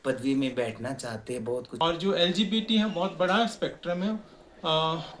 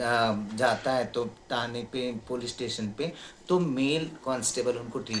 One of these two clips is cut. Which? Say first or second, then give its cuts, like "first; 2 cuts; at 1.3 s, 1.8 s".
first; 1 cut; at 1.8 s